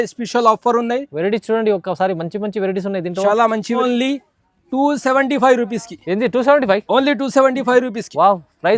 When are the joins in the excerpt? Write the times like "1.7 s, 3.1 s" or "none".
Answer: 3.8 s